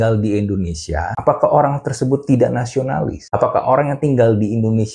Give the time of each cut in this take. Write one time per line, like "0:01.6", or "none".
0:01.1
0:03.2